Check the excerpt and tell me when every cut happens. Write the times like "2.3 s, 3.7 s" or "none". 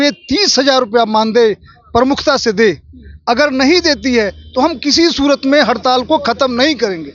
none